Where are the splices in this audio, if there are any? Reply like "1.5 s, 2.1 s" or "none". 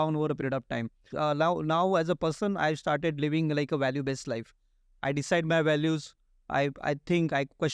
1.1 s